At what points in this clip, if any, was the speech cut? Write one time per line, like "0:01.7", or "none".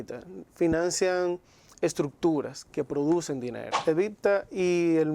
0:03.7